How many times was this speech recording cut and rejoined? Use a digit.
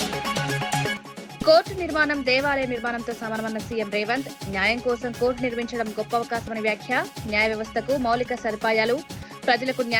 1